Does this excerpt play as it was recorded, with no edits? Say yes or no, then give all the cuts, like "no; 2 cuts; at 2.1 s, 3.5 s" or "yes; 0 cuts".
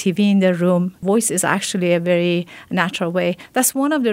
no; 1 cut; at 0.9 s